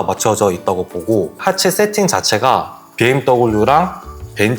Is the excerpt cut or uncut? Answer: cut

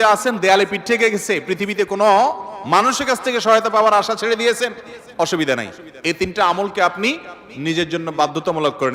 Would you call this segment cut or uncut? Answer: uncut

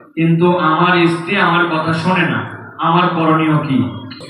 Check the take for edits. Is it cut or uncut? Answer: uncut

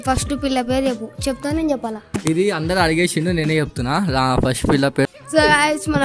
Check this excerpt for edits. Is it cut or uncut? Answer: cut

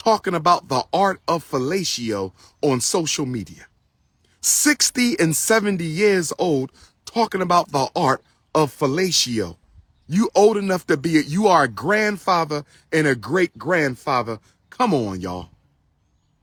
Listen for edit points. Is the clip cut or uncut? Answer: uncut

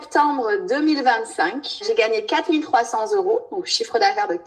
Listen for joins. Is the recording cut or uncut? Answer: cut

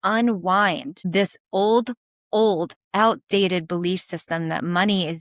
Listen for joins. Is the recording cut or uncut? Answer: cut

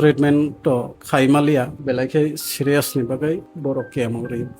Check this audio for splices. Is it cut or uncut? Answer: cut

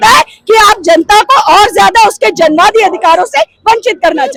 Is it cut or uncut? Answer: uncut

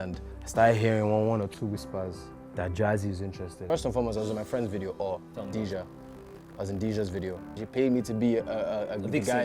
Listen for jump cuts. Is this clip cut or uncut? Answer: cut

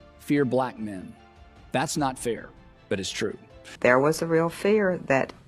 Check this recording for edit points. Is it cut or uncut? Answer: cut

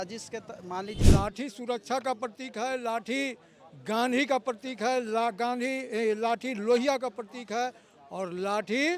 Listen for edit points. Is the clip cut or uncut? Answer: cut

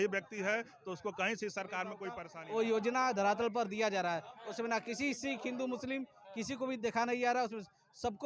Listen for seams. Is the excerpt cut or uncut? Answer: cut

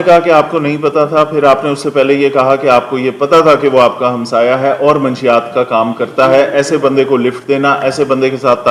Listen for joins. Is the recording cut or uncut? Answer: uncut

